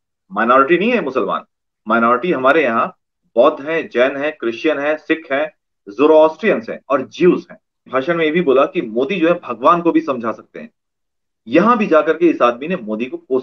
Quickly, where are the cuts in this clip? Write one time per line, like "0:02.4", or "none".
0:07.9